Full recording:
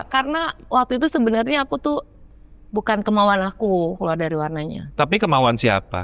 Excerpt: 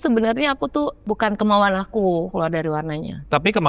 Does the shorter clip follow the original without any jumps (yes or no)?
no